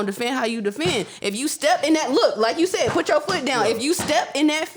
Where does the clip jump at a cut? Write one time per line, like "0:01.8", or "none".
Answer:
none